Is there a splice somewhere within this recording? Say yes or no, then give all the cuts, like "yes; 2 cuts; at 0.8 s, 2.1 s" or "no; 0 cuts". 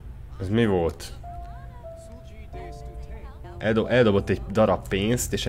yes; 1 cut; at 3.4 s